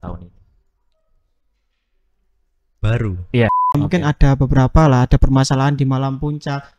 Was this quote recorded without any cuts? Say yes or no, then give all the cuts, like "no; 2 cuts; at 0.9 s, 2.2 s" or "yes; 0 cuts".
no; 1 cut; at 3.8 s